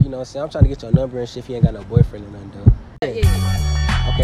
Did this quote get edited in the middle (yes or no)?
yes